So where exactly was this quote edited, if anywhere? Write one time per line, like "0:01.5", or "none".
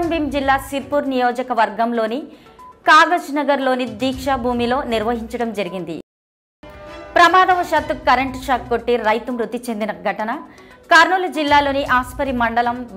0:06.2